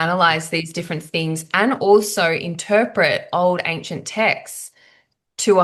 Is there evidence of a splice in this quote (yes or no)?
no